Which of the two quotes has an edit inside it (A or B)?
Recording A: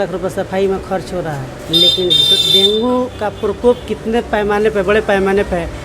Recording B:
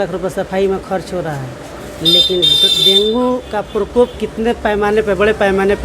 A